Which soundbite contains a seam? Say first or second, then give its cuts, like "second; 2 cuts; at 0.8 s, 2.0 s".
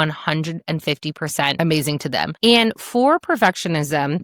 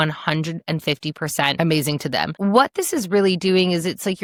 first; 1 cut; at 2.3 s